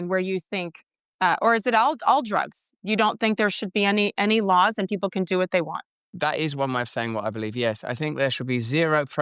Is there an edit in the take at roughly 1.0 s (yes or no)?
no